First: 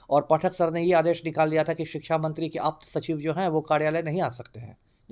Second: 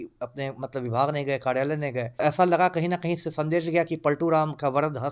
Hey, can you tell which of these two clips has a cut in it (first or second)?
second